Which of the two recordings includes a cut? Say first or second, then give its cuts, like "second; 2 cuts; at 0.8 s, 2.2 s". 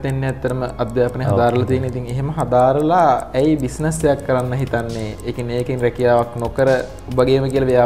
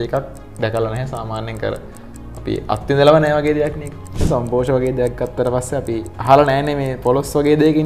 second; 1 cut; at 4.2 s